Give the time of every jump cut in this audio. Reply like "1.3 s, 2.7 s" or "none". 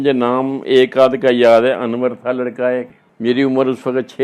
3.0 s